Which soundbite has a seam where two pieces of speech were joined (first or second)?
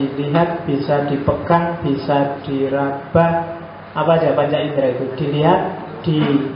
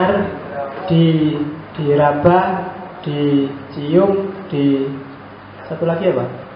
second